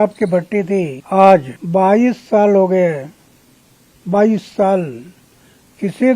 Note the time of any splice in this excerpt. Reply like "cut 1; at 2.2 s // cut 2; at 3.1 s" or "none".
cut 1; at 1.0 s // cut 2; at 1.6 s